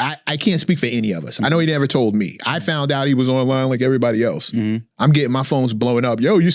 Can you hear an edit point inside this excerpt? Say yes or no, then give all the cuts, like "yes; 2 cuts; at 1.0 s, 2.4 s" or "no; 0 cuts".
no; 0 cuts